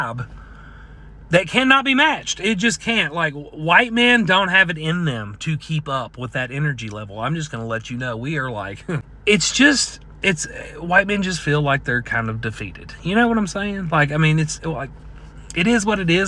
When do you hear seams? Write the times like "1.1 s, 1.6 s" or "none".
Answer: 9.1 s